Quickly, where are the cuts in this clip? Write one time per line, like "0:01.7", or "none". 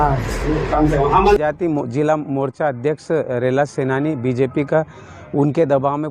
0:01.4